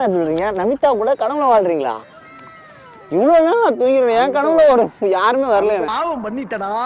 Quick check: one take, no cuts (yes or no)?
yes